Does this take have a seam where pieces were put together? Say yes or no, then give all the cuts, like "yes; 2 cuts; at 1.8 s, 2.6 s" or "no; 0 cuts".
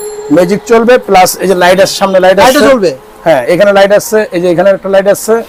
no; 0 cuts